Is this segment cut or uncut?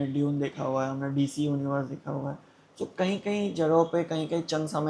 uncut